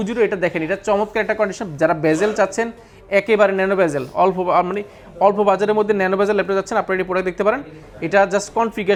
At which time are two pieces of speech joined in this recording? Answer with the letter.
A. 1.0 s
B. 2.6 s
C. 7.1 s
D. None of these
D